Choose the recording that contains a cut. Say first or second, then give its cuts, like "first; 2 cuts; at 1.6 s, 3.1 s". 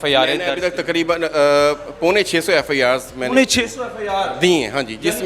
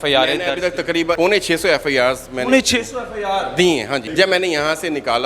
second; 2 cuts; at 1.2 s, 4.1 s